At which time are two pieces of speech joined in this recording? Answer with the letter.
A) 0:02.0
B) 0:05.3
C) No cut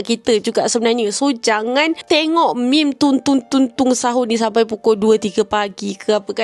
A